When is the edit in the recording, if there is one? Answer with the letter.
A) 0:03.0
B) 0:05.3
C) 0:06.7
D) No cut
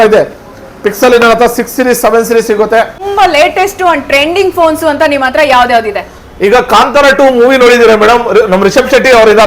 A